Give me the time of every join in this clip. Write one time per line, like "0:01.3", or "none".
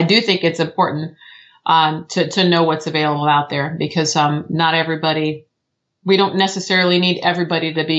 none